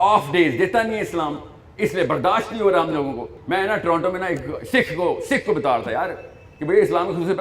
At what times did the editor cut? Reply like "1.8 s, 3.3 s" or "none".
3.3 s